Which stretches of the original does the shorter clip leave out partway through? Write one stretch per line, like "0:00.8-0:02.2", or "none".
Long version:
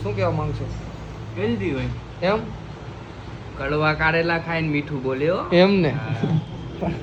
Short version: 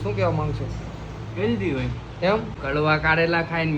0:02.6-0:03.5